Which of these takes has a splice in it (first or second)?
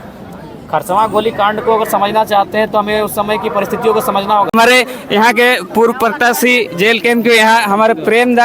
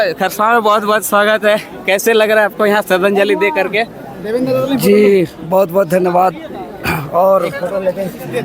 first